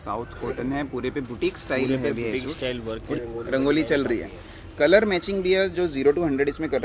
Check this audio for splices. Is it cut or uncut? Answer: cut